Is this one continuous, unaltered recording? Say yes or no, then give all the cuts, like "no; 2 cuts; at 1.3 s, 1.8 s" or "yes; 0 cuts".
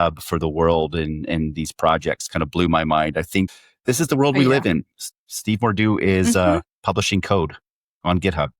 no; 1 cut; at 3.5 s